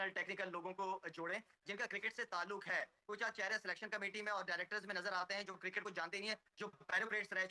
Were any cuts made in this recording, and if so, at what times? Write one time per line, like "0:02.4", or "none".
none